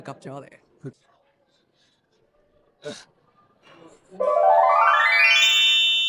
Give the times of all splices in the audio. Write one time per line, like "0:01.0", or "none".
0:00.9